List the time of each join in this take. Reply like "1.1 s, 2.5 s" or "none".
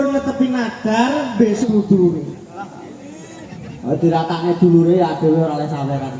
1.6 s